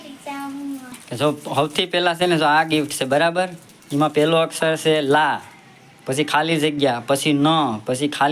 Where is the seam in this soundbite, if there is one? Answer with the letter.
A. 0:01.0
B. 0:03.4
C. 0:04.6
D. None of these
A